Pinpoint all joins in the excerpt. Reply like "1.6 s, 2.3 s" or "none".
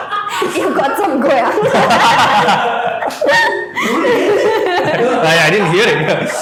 none

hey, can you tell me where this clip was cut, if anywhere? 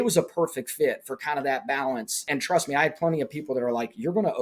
2.3 s

